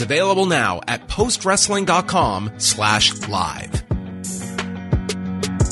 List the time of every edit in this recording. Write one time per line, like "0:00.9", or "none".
0:03.6